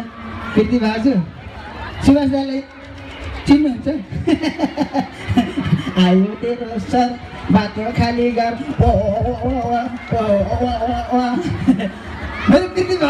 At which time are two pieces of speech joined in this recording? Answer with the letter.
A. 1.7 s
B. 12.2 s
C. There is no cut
C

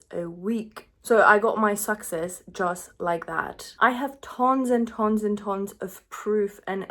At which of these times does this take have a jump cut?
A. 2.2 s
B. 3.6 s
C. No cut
B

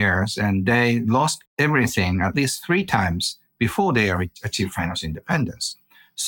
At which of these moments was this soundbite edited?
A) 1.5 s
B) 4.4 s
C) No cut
A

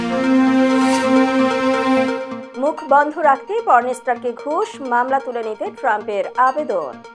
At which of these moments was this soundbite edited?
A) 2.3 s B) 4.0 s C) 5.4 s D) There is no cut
A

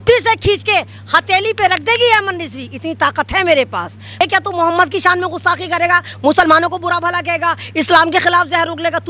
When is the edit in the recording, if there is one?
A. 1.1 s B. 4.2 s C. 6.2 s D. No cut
B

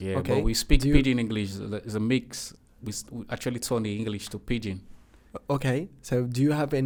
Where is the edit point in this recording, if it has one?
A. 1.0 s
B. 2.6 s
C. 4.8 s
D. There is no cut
D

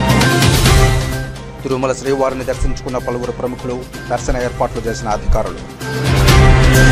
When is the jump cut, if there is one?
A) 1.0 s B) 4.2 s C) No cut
A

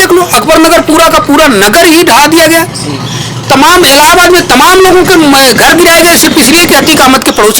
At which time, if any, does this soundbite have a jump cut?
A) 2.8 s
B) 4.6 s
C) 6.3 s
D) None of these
D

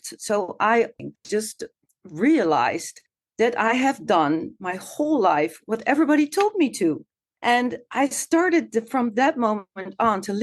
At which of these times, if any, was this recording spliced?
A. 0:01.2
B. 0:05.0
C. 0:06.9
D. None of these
A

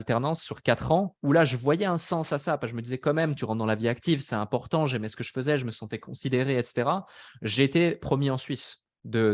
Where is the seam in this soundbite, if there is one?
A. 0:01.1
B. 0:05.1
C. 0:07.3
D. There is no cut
A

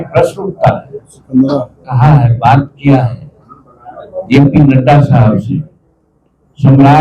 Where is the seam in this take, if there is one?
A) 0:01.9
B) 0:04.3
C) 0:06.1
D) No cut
A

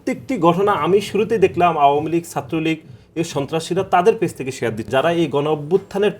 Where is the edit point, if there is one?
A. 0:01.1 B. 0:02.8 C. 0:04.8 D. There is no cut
C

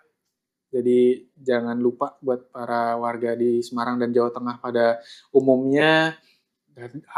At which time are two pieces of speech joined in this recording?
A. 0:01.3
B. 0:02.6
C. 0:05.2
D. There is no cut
D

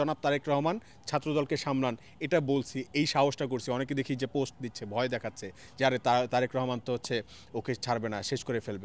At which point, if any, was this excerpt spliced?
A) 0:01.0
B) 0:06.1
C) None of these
C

